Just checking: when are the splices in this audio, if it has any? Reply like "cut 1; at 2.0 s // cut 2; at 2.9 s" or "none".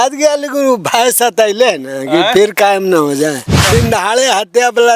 cut 1; at 3.5 s